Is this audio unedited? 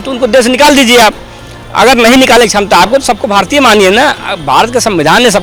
yes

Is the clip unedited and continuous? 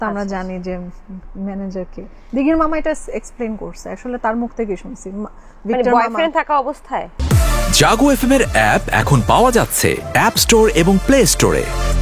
no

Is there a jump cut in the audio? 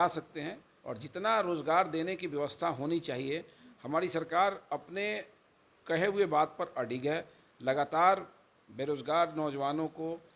no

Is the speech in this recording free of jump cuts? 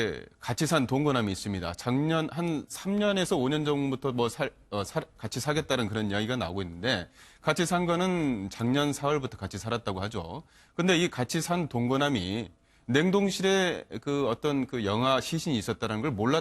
no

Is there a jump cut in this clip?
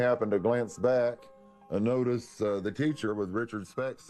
yes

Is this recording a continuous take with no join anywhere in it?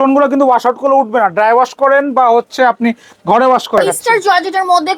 no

